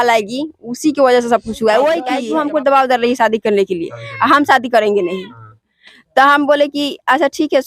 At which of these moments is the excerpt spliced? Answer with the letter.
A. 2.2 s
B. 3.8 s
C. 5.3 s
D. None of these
A